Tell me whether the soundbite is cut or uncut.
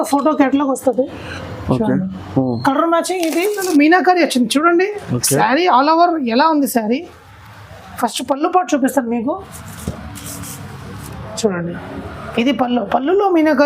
cut